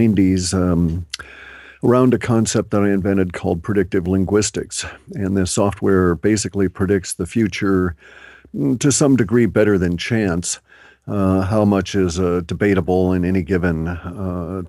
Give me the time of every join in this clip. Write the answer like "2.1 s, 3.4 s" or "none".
none